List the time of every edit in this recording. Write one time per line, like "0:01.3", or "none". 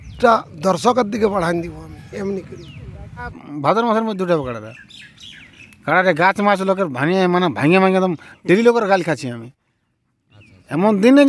0:03.5